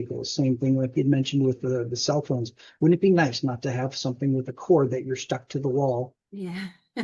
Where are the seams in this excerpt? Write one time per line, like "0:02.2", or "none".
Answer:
none